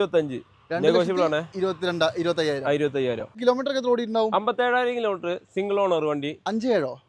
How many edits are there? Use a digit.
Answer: 1